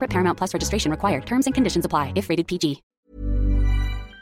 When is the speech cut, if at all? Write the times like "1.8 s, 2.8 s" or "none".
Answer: 2.9 s